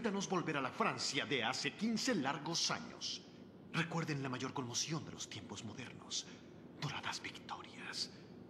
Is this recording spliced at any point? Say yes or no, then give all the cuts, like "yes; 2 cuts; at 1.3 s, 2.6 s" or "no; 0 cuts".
yes; 1 cut; at 5.5 s